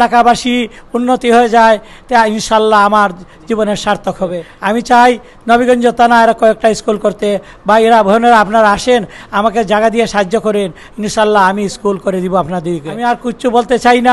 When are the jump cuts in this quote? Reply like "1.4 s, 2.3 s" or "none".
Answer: 4.5 s, 12.9 s